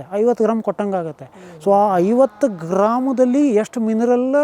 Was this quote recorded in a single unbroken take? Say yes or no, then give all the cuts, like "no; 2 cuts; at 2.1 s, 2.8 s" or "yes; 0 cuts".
yes; 0 cuts